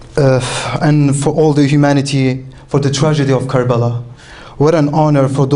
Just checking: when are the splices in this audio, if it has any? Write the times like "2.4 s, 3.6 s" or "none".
1.7 s